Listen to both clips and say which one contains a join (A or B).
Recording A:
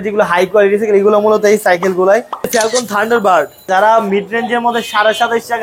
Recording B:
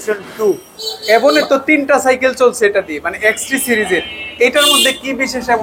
A